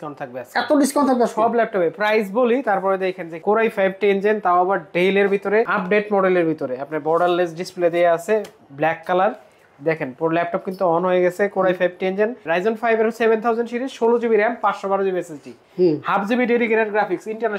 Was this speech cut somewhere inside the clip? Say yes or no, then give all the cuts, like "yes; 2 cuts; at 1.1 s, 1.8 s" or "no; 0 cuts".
yes; 3 cuts; at 3.3 s, 5.7 s, 12.4 s